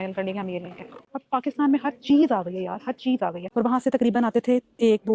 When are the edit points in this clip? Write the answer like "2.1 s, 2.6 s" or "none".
1.1 s, 3.4 s